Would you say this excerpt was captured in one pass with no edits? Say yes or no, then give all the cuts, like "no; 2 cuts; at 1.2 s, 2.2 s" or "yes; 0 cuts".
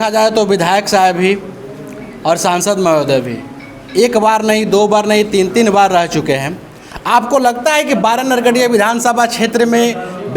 yes; 0 cuts